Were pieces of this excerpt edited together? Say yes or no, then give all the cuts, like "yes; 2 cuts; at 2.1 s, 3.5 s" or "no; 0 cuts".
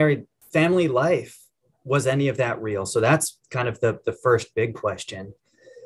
no; 0 cuts